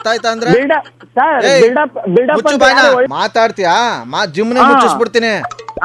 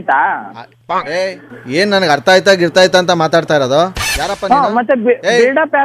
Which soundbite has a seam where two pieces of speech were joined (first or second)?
first